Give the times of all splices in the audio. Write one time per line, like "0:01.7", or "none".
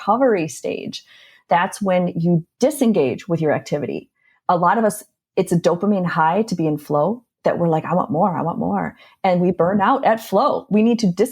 none

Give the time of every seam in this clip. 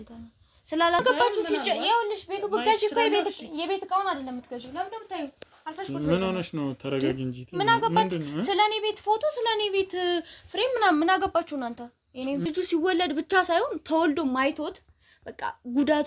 0:01.0
0:12.4

